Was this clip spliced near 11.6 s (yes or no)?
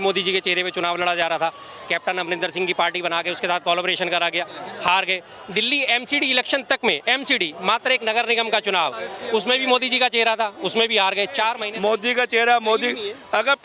yes